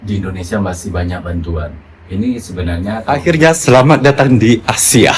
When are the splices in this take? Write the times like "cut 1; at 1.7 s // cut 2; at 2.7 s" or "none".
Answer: cut 1; at 3.0 s